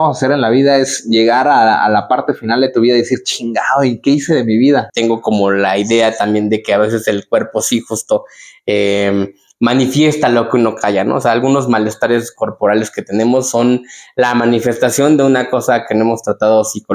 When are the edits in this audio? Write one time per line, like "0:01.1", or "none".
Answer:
0:04.9